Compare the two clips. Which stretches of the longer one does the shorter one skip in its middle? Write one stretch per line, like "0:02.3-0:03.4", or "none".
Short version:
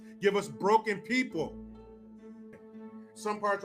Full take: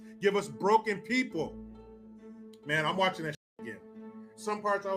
0:02.6-0:03.8